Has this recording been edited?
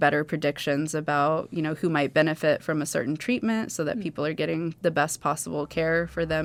no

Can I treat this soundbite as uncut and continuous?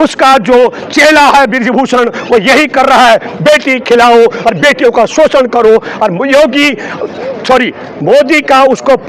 yes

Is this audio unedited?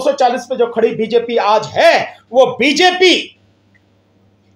yes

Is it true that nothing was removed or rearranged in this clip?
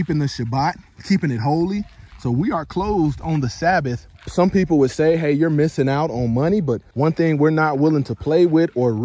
no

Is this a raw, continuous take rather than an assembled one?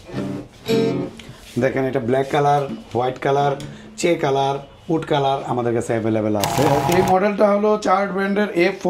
no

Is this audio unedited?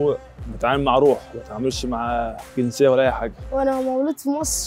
no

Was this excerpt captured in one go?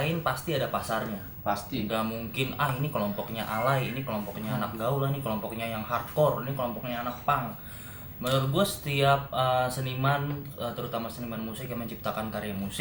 yes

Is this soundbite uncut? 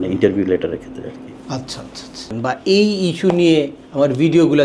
no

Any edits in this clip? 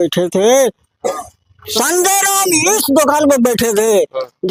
no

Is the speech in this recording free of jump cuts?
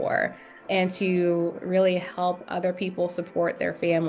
yes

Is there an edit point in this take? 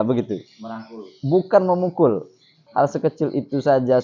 yes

